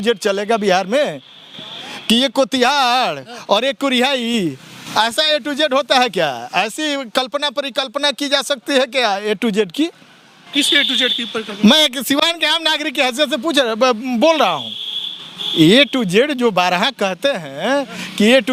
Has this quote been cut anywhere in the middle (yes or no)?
no